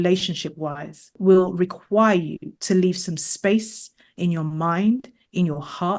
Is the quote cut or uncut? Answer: cut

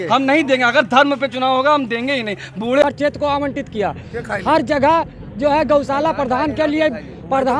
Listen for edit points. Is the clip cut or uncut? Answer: cut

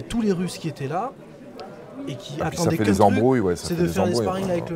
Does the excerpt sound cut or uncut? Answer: uncut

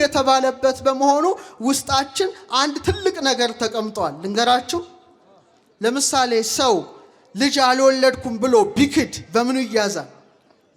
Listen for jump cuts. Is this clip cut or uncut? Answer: uncut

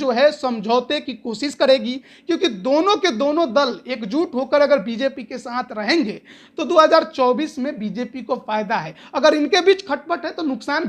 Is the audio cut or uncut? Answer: uncut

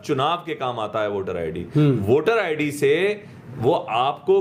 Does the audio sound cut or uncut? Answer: uncut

